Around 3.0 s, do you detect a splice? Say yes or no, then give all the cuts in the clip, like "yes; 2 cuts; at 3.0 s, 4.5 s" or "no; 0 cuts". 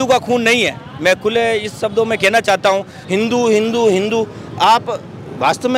yes; 1 cut; at 3.0 s